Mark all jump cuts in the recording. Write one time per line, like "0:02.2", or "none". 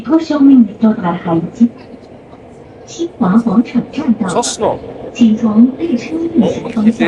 none